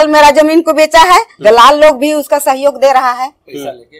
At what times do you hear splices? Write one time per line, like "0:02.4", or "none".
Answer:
0:01.3